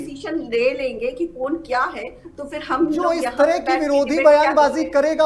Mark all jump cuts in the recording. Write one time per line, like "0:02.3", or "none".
none

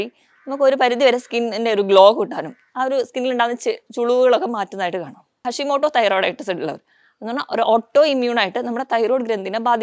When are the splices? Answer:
0:05.4

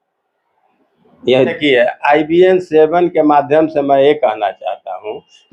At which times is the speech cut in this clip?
0:01.5

